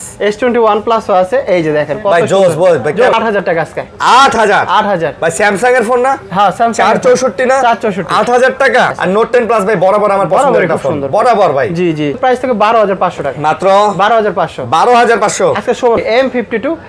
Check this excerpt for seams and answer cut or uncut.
cut